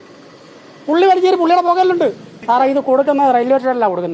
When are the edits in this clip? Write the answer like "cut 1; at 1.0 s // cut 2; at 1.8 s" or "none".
cut 1; at 2.3 s